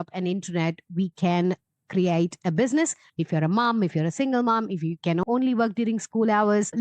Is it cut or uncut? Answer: cut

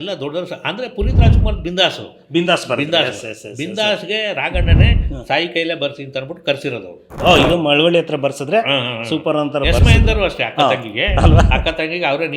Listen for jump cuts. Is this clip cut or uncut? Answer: cut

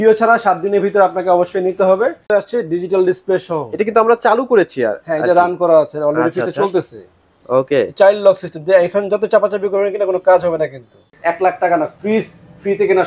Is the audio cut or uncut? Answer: cut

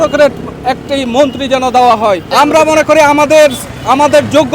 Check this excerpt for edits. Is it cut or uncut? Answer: cut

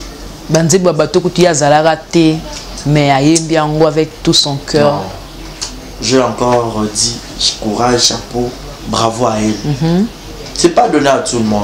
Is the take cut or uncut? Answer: uncut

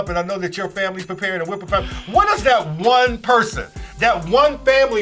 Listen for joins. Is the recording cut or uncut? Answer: uncut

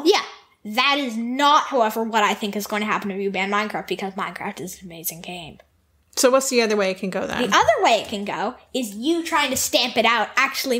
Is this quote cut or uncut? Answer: uncut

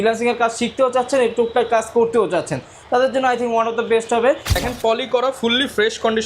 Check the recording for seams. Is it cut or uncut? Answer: cut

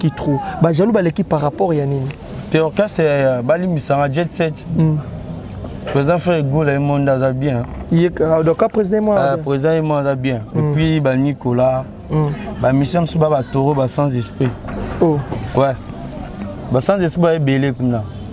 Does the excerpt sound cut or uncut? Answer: uncut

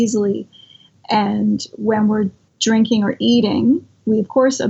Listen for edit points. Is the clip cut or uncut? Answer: cut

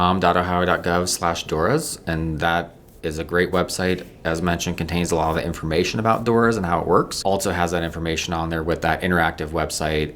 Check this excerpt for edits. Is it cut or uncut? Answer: cut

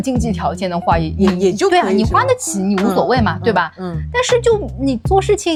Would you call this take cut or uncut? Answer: uncut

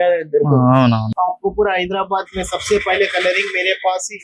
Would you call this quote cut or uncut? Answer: cut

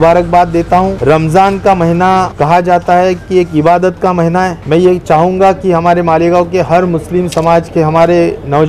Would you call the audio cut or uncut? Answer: cut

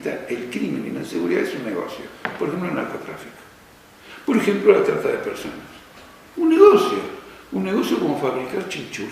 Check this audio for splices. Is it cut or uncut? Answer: cut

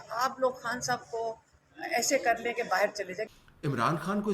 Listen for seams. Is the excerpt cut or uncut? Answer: cut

